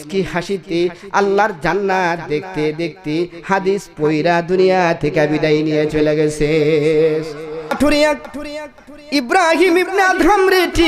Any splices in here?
yes; 1 cut; at 7.8 s

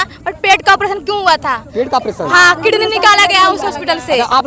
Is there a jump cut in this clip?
no; 0 cuts

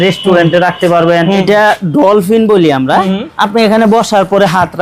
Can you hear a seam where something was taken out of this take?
yes; 1 cut; at 1.4 s

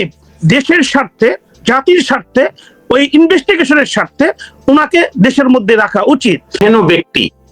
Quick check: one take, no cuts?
no; 1 cut; at 6.6 s

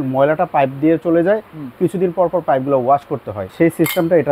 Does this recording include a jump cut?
yes; 1 cut; at 3.4 s

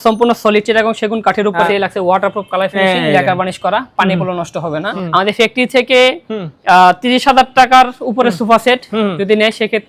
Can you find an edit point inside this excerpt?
yes; 2 cuts; at 1.7 s, 4.9 s

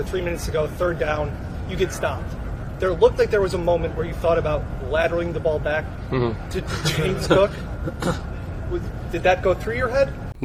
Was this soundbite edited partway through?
no; 0 cuts

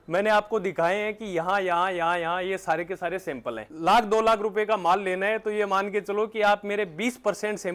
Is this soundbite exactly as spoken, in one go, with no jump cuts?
no; 1 cut; at 3.7 s

